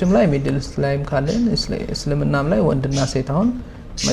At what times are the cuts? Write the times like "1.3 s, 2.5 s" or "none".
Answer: none